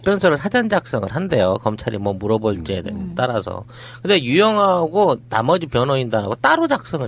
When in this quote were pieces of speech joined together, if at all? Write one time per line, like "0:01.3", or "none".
none